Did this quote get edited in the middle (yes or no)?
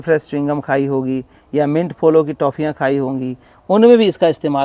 no